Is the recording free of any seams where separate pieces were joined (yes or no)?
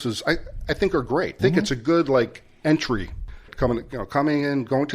no